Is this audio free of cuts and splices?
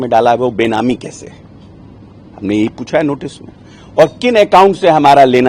yes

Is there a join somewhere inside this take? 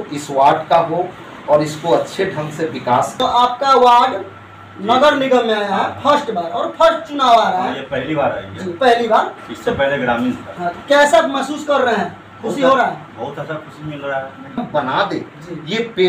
yes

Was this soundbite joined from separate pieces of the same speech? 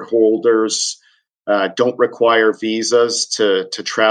no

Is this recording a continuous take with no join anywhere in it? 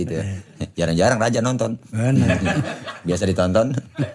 yes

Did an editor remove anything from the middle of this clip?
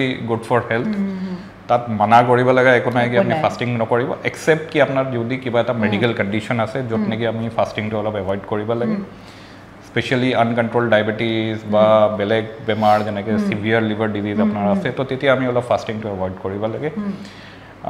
no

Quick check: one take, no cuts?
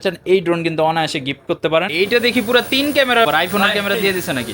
no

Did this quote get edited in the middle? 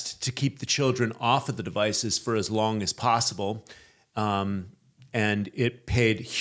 no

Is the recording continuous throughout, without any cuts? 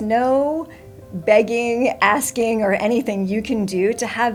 yes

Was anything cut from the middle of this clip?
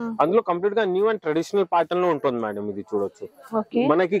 no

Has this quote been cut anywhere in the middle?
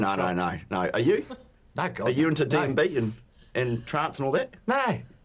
no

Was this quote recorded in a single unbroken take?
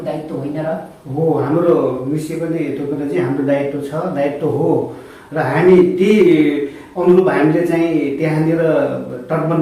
yes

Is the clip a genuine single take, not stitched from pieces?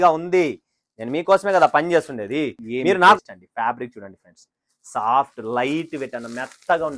no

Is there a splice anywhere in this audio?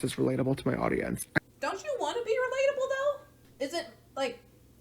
yes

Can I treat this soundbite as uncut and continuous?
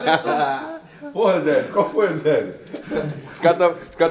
yes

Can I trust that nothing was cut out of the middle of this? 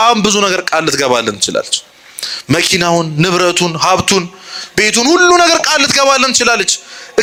yes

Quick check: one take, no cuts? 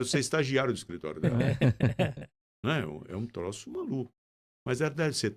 yes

